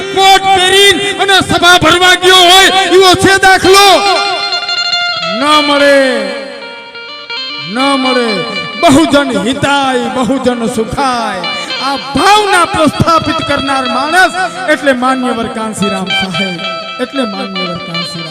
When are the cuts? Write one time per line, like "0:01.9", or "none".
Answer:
none

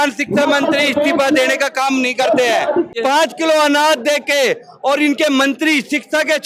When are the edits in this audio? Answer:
0:02.9

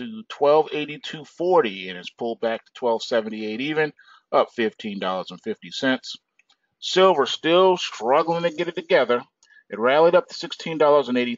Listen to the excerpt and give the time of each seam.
none

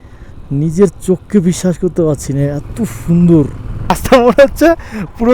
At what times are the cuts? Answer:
0:04.0

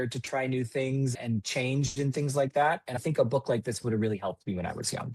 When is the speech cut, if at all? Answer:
0:01.1
0:02.9

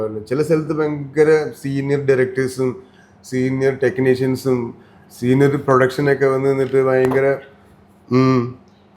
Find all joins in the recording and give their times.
none

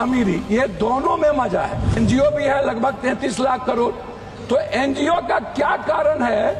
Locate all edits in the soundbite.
0:02.0

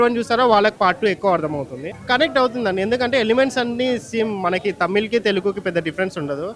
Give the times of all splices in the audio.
none

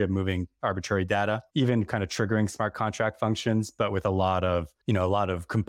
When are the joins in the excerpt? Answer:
0:01.5
0:04.7

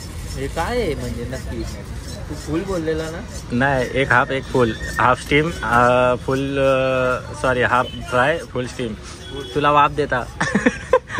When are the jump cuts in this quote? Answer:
none

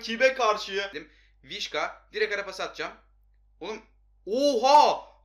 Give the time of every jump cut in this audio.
0:01.0

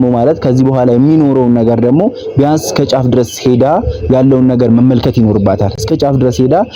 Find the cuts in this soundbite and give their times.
none

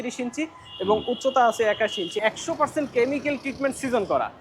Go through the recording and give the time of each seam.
0:02.2

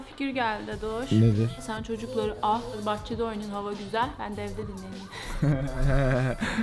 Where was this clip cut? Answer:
0:01.6
0:02.8

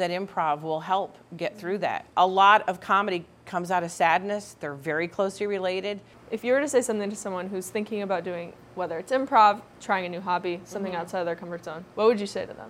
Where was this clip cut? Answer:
0:02.0
0:06.1
0:09.7
0:11.8

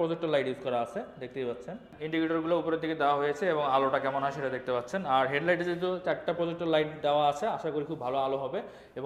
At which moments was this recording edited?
none

